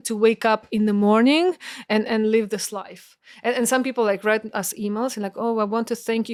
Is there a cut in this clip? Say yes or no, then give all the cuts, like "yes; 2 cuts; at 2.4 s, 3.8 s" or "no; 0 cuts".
no; 0 cuts